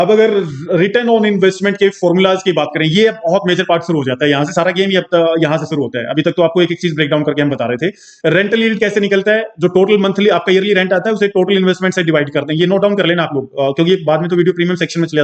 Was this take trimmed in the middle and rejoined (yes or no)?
no